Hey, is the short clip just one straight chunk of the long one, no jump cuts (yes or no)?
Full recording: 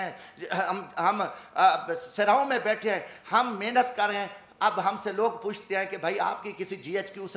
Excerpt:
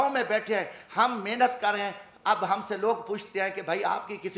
yes